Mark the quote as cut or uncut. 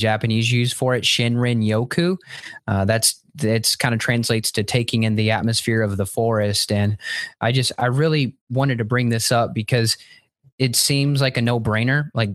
uncut